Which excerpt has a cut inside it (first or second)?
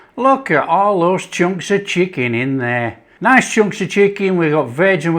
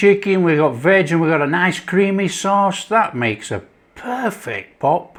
first